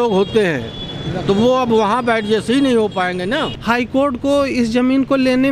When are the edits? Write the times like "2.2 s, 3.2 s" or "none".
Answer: 3.5 s